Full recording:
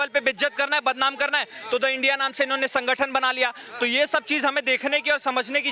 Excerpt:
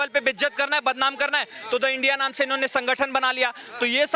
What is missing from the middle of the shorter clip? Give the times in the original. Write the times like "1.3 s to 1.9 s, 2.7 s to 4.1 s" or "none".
none